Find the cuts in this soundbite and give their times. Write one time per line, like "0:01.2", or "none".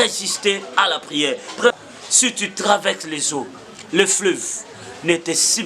0:01.7